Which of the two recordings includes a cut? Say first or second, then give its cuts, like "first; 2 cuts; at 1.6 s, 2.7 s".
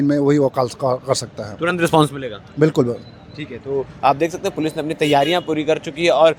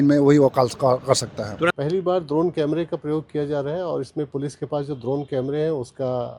second; 1 cut; at 1.7 s